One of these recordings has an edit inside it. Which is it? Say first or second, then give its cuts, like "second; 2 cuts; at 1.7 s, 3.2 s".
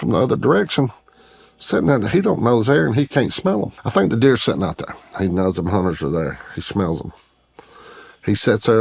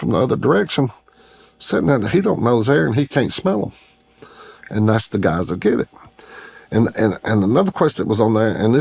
first; 1 cut; at 3.8 s